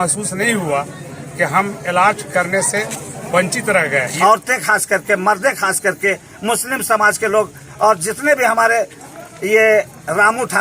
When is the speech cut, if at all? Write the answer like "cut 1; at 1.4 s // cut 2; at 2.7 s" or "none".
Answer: cut 1; at 4.1 s